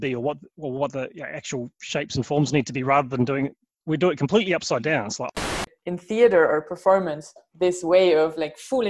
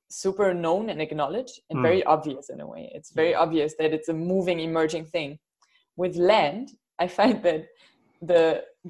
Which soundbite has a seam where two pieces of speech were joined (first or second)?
first